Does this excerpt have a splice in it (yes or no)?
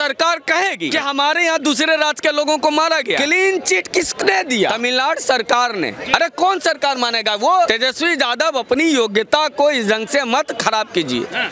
yes